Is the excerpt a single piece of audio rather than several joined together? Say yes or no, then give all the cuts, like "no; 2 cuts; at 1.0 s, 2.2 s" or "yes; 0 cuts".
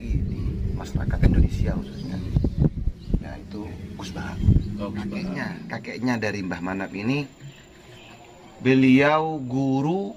no; 1 cut; at 5.6 s